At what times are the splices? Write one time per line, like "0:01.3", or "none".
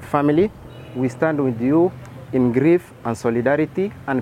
none